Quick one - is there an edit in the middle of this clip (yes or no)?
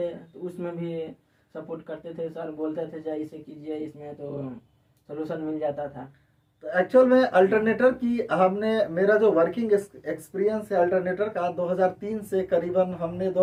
no